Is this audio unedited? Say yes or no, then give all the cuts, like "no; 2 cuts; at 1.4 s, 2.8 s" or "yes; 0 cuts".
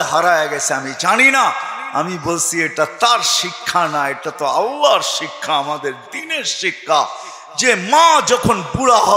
yes; 0 cuts